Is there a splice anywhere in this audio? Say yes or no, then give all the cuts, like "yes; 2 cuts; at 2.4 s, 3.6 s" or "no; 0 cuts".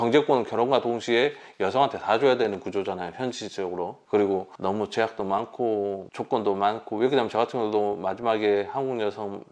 no; 0 cuts